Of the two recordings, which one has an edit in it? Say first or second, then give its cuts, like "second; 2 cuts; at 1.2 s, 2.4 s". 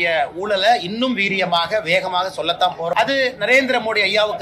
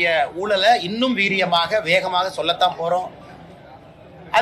first; 1 cut; at 2.9 s